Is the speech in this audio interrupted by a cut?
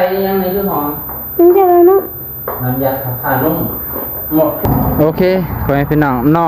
yes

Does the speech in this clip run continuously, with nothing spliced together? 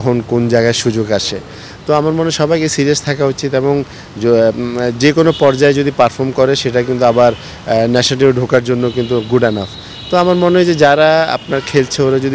yes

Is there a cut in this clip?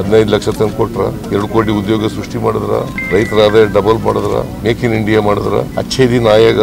yes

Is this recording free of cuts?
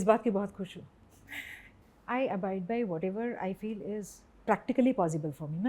no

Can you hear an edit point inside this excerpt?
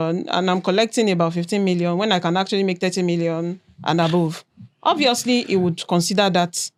no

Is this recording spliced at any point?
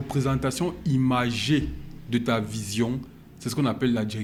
no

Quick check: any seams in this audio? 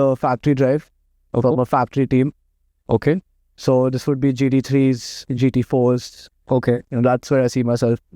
no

